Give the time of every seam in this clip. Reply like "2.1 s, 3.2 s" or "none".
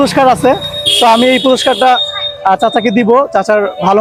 none